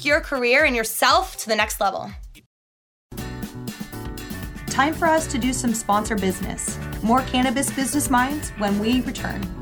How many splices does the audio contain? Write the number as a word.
one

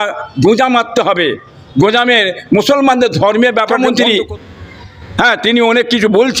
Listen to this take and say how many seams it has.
one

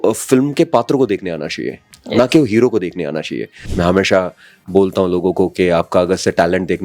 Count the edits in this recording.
one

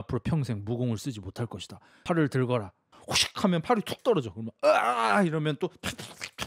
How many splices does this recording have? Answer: two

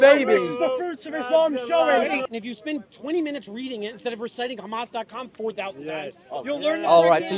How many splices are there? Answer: one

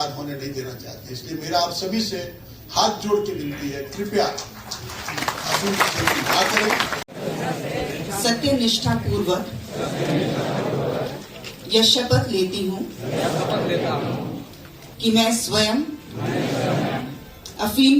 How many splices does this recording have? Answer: one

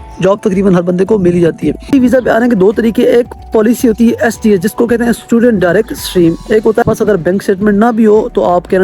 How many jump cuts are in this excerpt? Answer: two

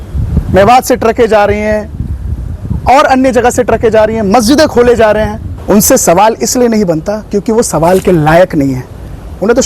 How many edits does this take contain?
one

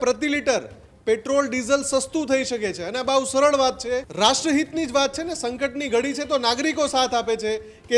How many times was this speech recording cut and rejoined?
one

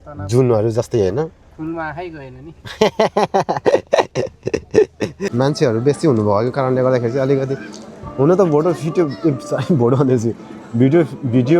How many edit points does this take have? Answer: one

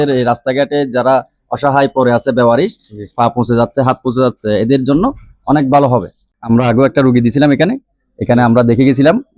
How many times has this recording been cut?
one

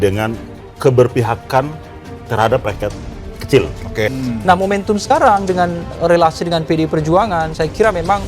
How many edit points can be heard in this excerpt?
one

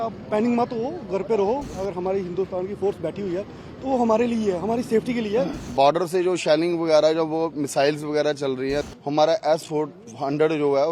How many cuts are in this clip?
three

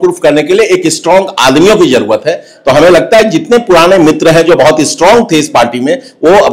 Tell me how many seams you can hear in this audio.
zero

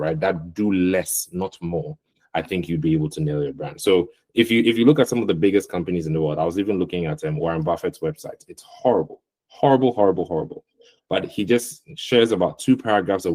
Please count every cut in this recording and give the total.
zero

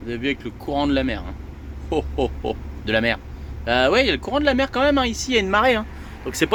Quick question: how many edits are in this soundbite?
zero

